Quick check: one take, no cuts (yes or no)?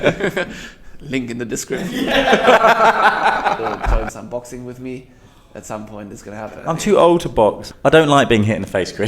no